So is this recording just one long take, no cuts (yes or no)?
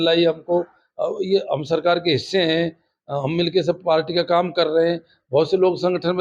yes